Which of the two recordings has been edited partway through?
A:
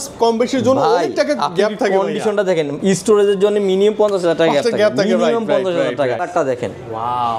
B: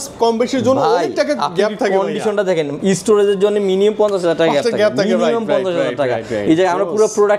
A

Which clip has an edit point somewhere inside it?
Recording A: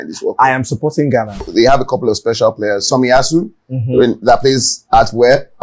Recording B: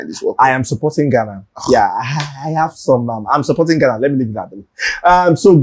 A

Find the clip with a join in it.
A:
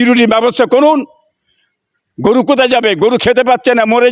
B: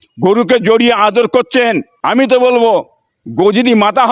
B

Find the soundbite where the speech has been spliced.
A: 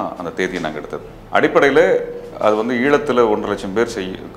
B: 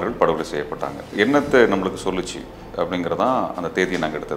B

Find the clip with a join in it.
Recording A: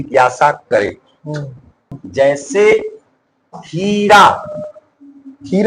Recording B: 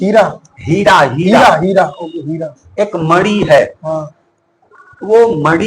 A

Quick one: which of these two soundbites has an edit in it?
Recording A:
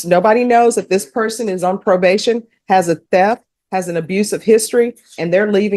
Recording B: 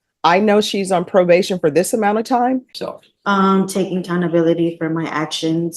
B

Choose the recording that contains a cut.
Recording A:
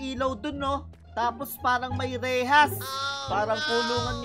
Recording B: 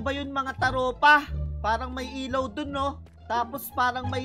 A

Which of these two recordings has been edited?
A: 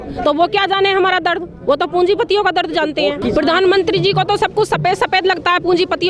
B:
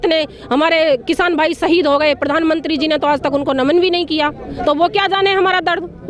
A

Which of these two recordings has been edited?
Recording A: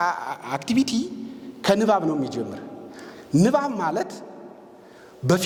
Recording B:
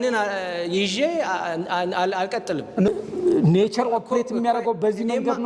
B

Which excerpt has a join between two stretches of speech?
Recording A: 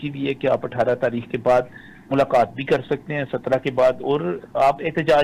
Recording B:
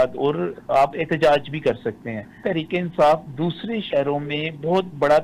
B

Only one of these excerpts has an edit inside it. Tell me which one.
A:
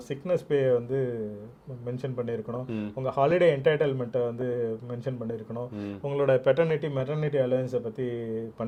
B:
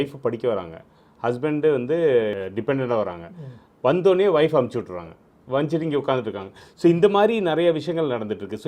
B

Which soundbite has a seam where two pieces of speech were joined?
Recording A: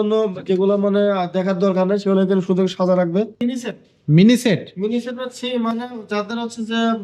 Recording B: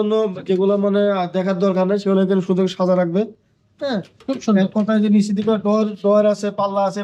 A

